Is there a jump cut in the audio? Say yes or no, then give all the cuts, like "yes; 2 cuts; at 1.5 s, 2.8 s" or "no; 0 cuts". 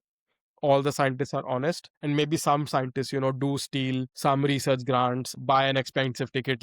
yes; 3 cuts; at 1.9 s, 4.1 s, 5.3 s